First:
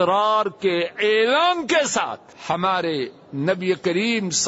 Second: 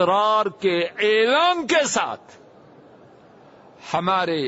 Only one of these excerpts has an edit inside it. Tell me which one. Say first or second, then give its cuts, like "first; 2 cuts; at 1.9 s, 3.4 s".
first; 1 cut; at 2.3 s